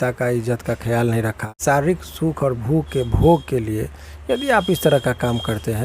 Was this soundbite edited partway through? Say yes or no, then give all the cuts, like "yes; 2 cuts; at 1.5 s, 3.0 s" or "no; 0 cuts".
yes; 1 cut; at 1.6 s